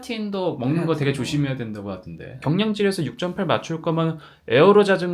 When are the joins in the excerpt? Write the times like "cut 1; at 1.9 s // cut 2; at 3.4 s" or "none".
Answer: cut 1; at 2.3 s